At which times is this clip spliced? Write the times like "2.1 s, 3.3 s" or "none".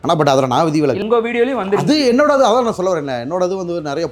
1.0 s